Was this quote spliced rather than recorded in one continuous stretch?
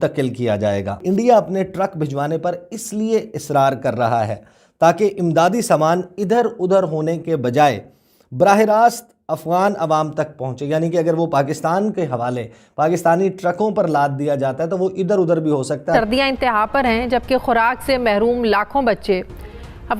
yes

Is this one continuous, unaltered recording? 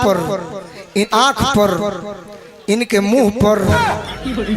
no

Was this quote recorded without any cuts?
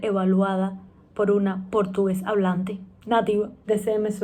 yes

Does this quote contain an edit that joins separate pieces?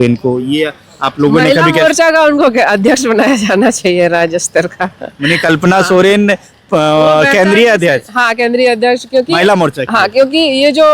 no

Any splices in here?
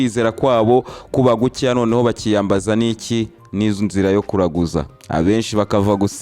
no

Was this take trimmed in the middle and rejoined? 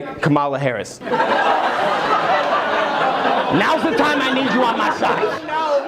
no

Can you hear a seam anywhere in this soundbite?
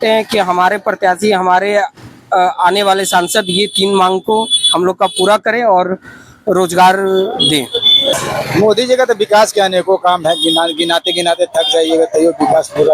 yes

